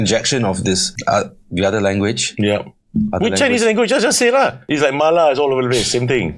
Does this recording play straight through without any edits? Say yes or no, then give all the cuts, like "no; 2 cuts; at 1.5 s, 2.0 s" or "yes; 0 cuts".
no; 2 cuts; at 0.9 s, 4.7 s